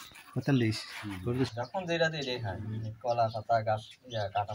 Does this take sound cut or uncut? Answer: cut